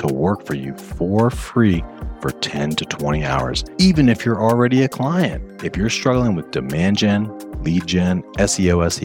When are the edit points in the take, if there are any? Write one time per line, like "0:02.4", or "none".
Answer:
0:03.6